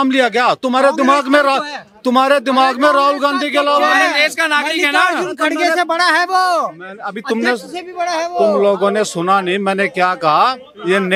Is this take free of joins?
yes; 0 cuts

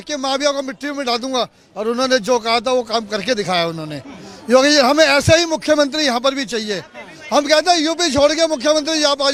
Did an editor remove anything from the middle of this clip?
no; 0 cuts

